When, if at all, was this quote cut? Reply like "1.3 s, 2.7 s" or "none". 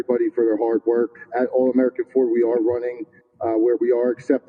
1.2 s